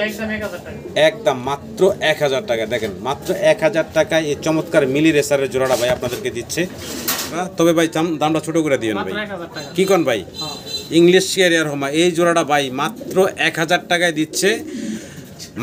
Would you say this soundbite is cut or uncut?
cut